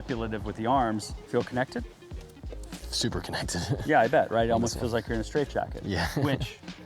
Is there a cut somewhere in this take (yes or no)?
yes